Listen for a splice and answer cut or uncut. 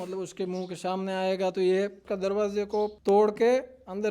cut